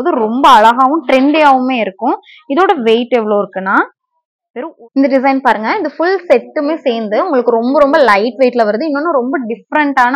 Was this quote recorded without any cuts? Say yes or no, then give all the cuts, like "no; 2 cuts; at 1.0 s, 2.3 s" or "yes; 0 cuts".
no; 1 cut; at 4.5 s